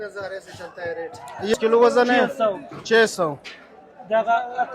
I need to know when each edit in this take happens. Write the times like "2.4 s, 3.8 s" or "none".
1.5 s